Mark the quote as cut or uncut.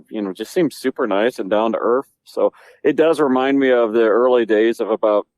uncut